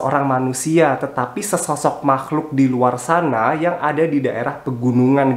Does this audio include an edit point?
no; 0 cuts

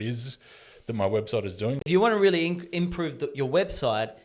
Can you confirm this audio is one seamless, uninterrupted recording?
no; 1 cut; at 1.8 s

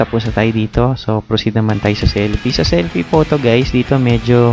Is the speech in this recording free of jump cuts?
yes; 0 cuts

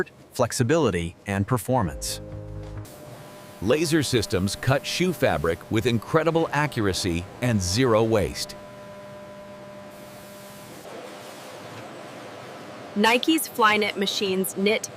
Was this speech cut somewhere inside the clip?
yes; 1 cut; at 2.8 s

